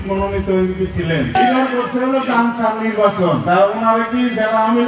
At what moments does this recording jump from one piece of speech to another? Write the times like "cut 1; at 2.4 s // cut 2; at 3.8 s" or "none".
cut 1; at 1.4 s // cut 2; at 3.4 s